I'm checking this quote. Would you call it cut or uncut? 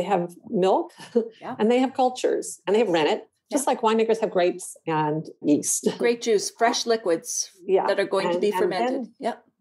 cut